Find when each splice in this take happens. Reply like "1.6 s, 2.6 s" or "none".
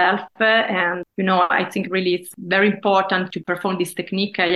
1.0 s, 2.3 s, 3.3 s